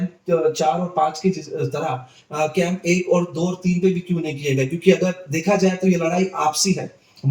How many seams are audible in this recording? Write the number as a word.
zero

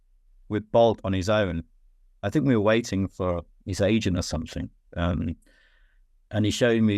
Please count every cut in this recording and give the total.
zero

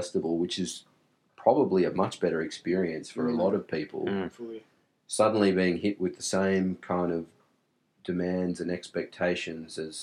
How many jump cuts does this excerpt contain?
zero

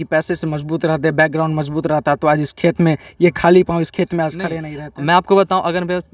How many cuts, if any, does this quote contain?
zero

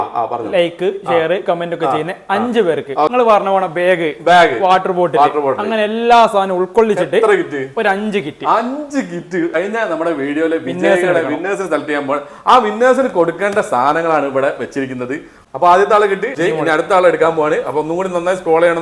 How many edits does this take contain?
four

